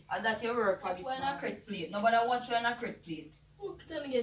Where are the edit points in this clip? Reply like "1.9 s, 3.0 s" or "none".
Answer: 1.2 s